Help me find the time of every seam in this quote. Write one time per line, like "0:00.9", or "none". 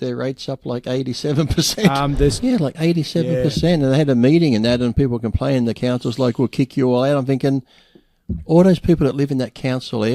0:02.4